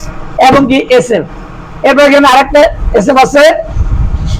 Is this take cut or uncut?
uncut